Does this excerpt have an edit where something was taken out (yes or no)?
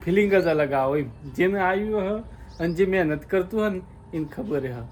no